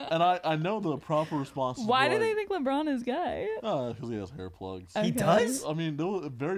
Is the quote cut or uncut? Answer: cut